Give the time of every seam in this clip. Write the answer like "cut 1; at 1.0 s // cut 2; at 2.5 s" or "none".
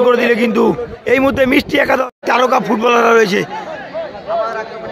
cut 1; at 2.2 s